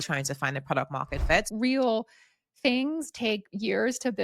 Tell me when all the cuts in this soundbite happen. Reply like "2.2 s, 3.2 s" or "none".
1.5 s